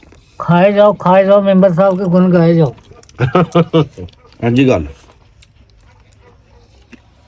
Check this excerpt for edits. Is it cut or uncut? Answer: uncut